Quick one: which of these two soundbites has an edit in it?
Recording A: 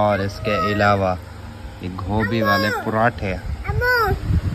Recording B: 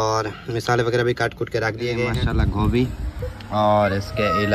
B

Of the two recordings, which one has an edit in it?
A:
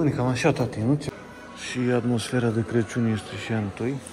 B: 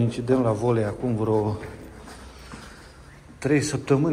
A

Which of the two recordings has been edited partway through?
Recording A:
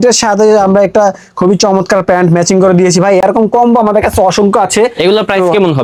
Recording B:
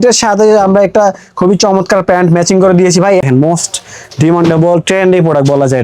B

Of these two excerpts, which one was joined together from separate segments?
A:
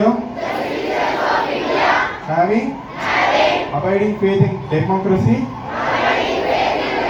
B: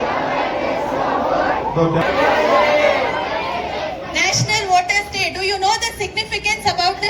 B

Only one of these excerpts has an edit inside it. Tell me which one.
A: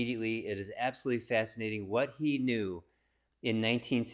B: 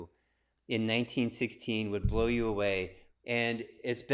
B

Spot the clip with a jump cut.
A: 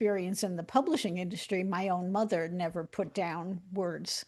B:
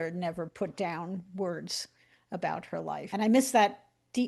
B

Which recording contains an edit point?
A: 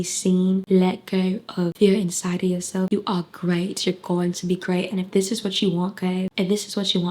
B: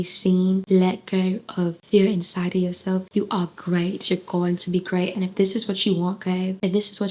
A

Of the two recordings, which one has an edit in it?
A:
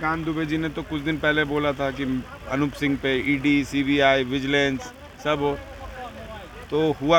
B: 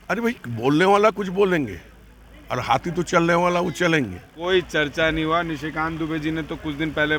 B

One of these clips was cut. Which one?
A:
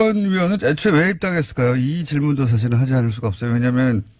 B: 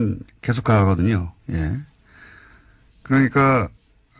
B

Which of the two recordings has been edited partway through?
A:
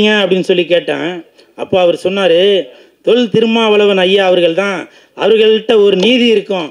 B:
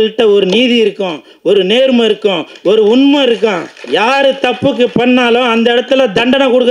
B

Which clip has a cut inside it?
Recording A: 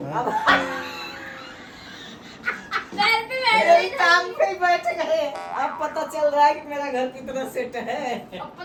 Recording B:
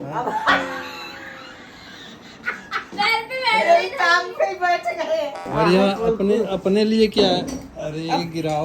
B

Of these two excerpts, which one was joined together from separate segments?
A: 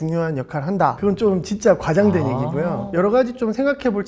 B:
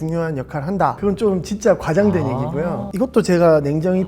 B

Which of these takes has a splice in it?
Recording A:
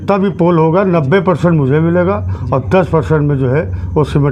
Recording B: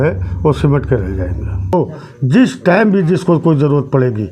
B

